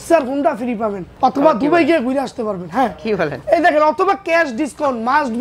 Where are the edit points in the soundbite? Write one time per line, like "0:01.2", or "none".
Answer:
0:01.0
0:03.4